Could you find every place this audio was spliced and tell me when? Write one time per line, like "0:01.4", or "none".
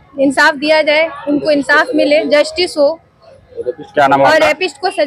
none